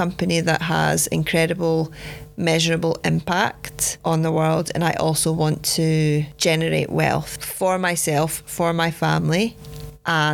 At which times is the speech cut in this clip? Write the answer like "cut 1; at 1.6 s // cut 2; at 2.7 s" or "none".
none